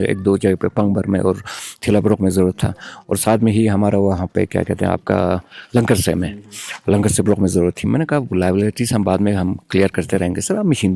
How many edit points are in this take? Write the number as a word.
zero